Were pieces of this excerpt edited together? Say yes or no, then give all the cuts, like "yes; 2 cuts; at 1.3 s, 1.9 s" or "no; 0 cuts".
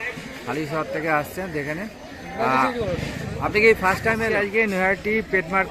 yes; 1 cut; at 4.4 s